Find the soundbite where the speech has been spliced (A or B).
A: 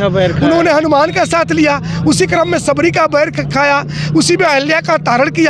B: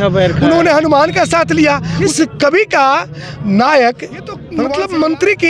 B